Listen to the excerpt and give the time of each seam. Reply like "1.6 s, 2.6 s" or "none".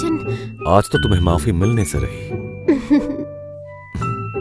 none